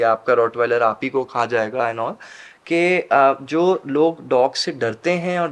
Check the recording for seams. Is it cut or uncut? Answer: uncut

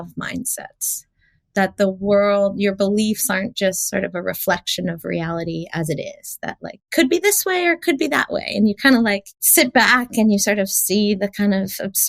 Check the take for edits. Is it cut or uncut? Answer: cut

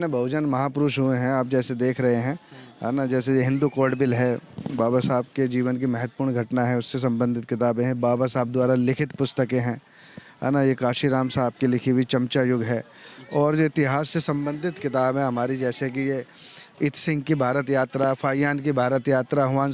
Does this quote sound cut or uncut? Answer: uncut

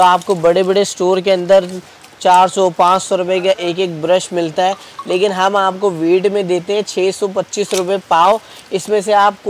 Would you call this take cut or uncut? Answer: uncut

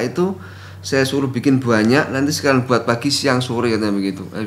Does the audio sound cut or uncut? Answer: uncut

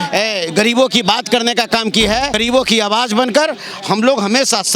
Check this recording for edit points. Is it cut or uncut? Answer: cut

